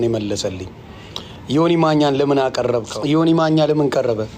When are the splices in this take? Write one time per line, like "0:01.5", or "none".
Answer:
0:02.9